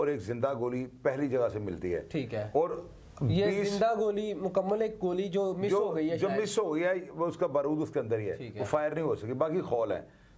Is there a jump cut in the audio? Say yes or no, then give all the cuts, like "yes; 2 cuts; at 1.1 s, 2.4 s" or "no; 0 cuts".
no; 0 cuts